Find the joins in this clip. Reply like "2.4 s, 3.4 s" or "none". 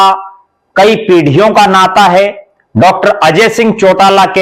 none